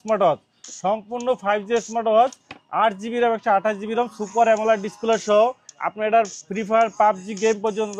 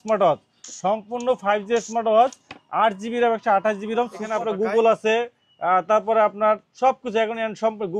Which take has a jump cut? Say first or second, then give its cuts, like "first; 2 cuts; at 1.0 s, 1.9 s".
second; 1 cut; at 4.2 s